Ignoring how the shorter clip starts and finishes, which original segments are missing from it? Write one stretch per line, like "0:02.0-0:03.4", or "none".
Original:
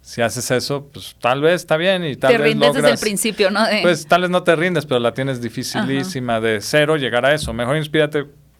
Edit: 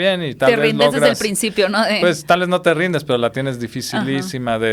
none